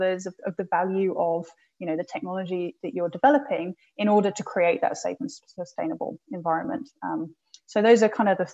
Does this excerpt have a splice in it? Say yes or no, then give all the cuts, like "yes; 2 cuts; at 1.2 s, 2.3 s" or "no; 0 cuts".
no; 0 cuts